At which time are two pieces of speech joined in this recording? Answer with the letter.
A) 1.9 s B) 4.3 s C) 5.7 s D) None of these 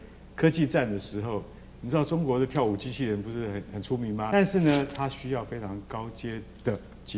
B